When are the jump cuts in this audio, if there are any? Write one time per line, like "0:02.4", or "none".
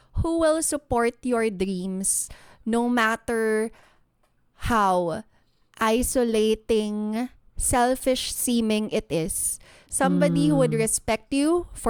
none